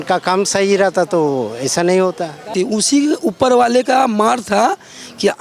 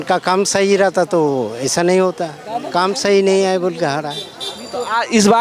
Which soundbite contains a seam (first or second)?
first